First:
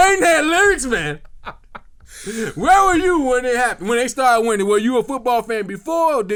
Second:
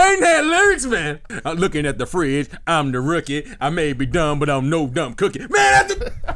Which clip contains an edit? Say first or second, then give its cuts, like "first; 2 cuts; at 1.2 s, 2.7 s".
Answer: second; 1 cut; at 1.3 s